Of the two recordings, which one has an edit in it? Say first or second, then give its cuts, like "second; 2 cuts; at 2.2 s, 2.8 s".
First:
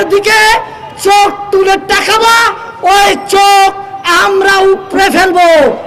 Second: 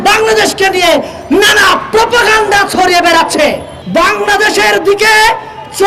second; 1 cut; at 3.7 s